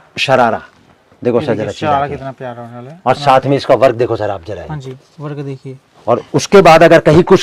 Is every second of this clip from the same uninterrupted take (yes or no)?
yes